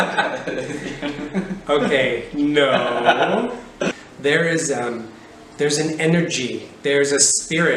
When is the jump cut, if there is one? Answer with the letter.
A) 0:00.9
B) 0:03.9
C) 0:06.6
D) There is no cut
B